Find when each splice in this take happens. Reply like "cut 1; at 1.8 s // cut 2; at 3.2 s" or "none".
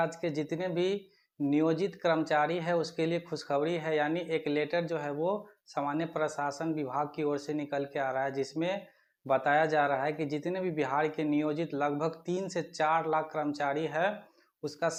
none

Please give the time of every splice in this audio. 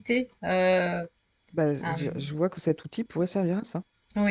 none

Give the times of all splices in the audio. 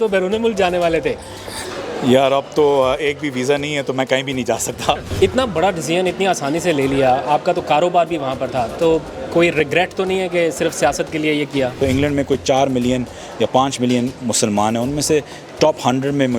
cut 1; at 5.1 s // cut 2; at 11.8 s

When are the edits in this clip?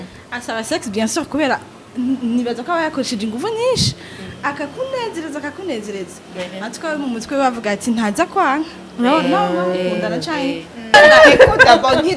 cut 1; at 10.9 s

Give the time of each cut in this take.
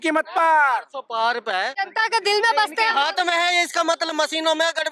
cut 1; at 1.8 s

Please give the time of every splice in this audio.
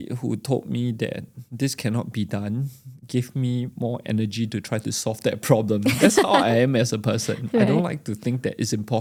none

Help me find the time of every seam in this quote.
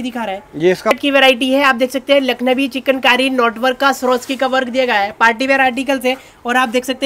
cut 1; at 0.9 s

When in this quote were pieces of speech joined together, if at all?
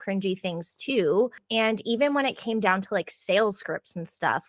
cut 1; at 1.4 s

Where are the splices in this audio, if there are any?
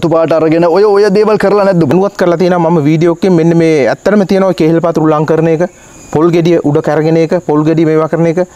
cut 1; at 1.9 s

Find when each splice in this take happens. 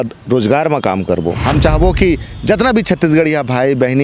cut 1; at 1.4 s

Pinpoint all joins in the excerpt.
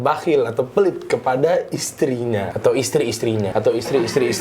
cut 1; at 2.5 s // cut 2; at 3.5 s

